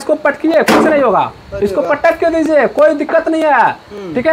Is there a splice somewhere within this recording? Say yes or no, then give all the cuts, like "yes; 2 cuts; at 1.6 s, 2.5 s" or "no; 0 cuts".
no; 0 cuts